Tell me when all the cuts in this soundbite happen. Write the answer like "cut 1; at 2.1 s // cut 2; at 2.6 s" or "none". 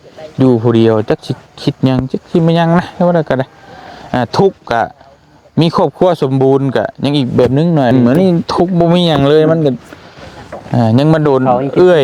cut 1; at 7.9 s